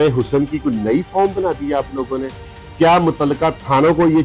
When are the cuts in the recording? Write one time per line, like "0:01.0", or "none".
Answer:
none